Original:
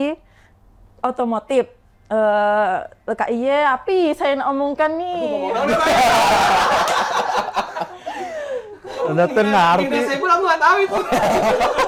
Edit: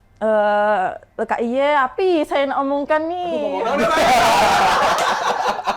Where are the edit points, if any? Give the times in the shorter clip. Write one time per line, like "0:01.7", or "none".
none

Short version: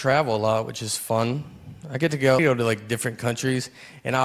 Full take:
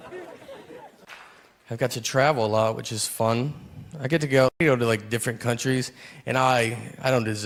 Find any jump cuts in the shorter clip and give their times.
0:02.4

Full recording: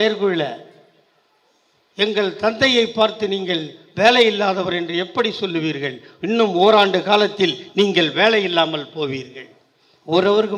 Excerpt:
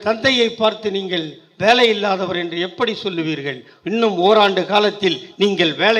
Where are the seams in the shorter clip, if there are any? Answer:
none

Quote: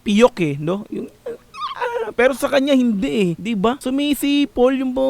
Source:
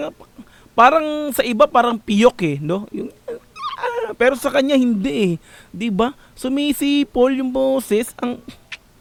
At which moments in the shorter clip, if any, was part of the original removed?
0:03.7

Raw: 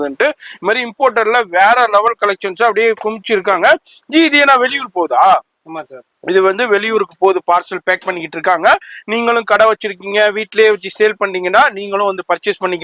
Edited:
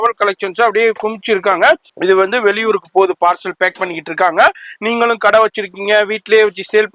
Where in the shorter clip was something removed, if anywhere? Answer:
0:01.9

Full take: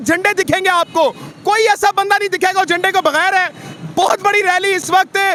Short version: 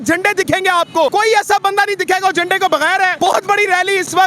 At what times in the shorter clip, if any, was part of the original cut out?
0:01.1
0:03.1

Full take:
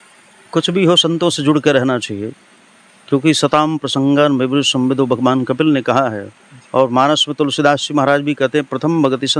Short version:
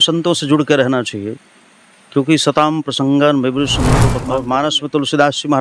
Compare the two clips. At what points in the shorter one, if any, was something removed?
0:03.9

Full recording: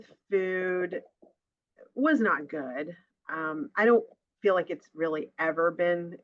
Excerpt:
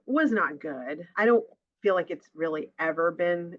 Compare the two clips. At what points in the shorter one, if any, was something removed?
0:01.1

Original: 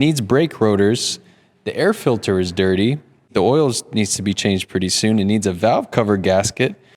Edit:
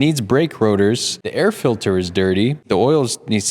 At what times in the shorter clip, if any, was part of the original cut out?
0:01.1
0:02.6

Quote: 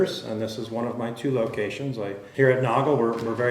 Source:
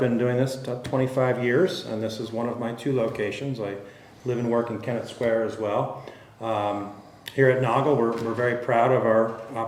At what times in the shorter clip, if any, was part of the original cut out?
0:02.2

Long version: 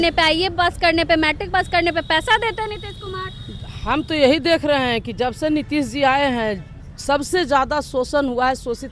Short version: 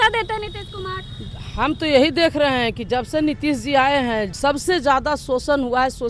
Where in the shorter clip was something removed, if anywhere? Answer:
0:04.3

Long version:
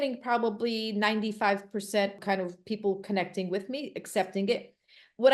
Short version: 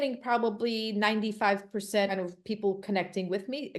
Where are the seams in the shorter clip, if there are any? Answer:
0:02.1

